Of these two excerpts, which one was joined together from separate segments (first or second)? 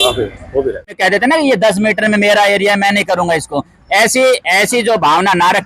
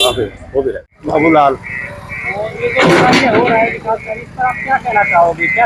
first